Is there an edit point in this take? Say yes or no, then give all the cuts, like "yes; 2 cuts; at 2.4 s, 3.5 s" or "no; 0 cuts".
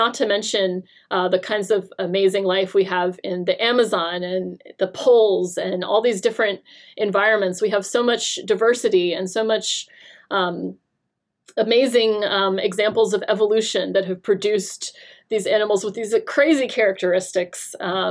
no; 0 cuts